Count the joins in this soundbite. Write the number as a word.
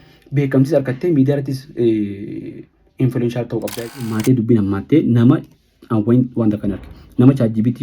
one